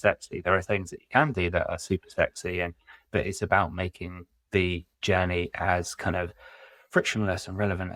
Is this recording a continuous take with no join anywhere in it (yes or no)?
yes